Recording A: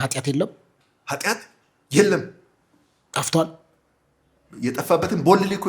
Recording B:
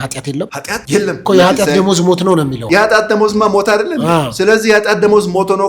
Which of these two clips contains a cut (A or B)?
B